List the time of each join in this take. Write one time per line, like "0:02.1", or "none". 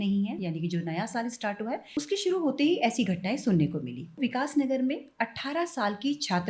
0:01.9
0:04.2